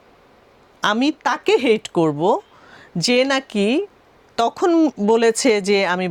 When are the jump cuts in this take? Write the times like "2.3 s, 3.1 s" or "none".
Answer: none